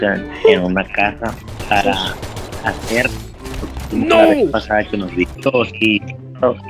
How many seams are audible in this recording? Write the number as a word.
one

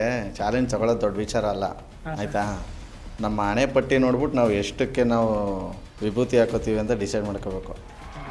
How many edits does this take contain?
zero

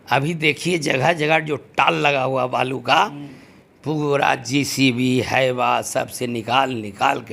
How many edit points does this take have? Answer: zero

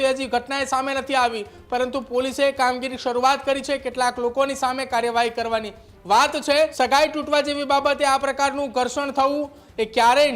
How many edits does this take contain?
one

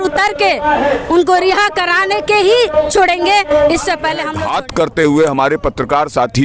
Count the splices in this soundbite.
one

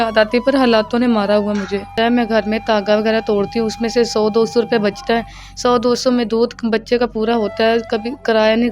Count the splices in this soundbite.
one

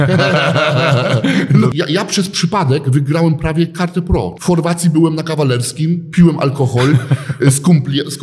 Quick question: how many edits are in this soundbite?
two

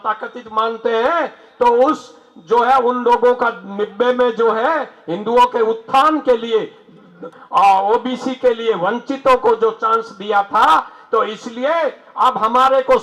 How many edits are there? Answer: zero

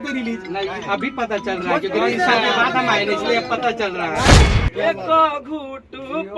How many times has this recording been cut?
one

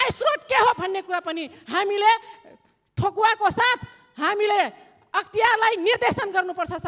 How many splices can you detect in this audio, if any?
zero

